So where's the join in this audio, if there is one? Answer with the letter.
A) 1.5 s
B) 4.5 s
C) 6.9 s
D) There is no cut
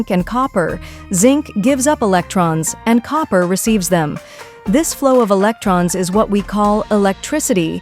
D